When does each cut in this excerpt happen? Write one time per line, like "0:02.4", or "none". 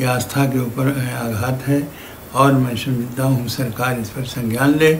none